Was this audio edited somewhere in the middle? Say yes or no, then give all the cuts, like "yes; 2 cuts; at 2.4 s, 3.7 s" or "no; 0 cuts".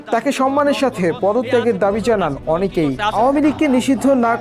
yes; 1 cut; at 3.1 s